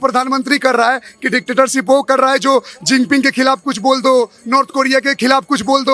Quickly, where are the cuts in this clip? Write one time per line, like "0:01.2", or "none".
none